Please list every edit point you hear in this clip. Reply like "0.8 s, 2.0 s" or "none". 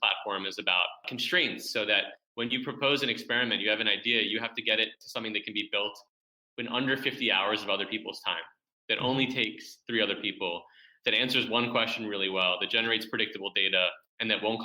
1.1 s